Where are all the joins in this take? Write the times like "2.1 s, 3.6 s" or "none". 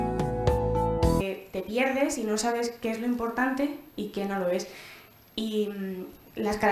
none